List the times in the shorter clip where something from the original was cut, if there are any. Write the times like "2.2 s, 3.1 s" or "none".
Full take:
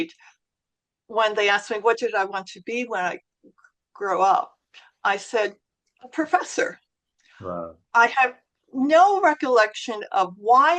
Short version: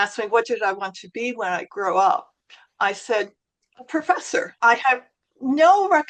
1.7 s, 4.5 s